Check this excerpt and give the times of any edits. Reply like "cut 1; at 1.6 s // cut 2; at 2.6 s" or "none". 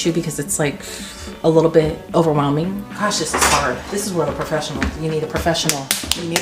cut 1; at 2.0 s // cut 2; at 2.9 s